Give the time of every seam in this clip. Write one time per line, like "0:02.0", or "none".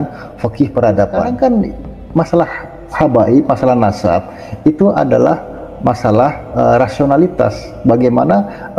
0:01.3